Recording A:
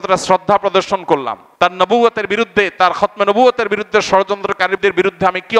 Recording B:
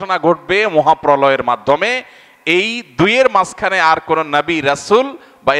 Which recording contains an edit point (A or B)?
A